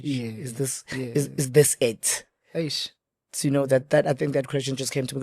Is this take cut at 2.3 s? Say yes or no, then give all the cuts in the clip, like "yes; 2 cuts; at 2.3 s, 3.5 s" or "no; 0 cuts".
no; 0 cuts